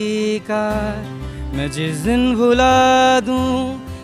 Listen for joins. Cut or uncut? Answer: uncut